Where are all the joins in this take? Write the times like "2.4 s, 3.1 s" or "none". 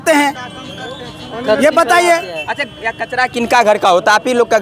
none